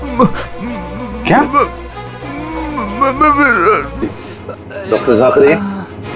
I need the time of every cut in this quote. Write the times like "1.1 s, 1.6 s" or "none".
4.0 s